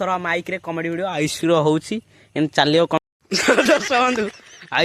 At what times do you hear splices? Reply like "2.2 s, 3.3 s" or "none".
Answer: 3.0 s